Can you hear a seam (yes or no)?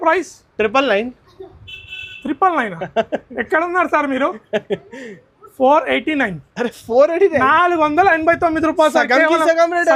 no